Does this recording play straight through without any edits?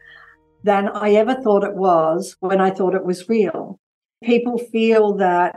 no; 1 cut; at 4.2 s

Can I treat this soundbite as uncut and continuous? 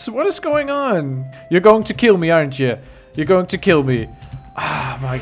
no; 1 cut; at 1.3 s

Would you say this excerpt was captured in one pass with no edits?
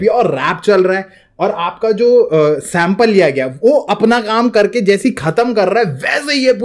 yes; 0 cuts

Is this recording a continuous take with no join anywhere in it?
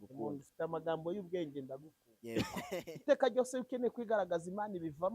no; 1 cut; at 2.8 s

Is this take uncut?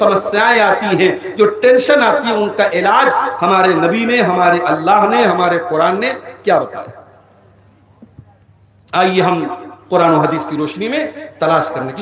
yes; 0 cuts

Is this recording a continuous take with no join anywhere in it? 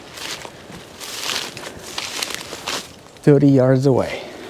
no; 1 cut; at 3.1 s

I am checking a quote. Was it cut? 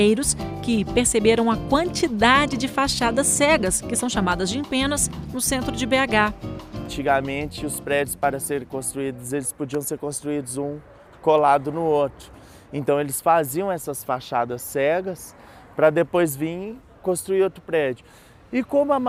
no; 0 cuts

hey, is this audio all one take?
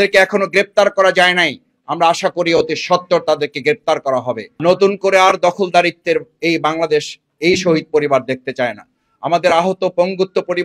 no; 1 cut; at 4.4 s

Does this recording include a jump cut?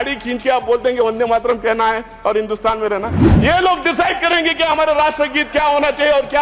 yes; 1 cut; at 3.2 s

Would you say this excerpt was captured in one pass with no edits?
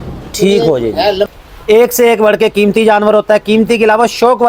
no; 1 cut; at 1.3 s

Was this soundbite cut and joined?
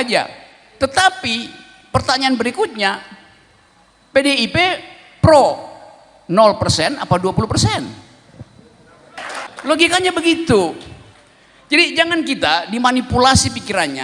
yes; 1 cut; at 9.4 s

